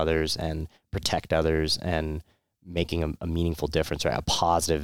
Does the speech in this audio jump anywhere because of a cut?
no; 0 cuts

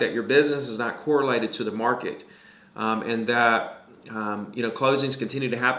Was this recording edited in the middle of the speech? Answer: no; 0 cuts

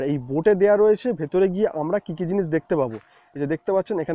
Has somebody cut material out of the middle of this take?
no; 0 cuts

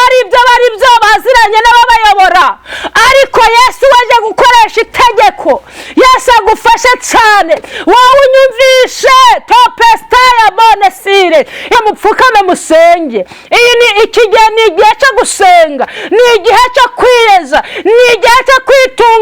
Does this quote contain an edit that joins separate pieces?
yes; 1 cut; at 11.7 s

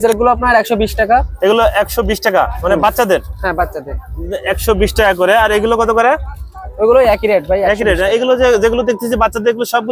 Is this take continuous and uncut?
yes; 0 cuts

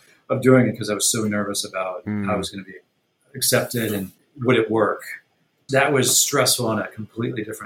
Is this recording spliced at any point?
yes; 2 cuts; at 4.2 s, 5.6 s

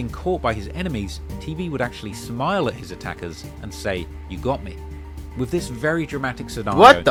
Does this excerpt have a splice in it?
no; 0 cuts

